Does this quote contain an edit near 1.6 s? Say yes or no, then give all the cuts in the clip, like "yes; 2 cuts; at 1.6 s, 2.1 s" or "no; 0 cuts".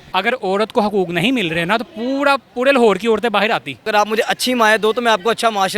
no; 1 cut; at 3.8 s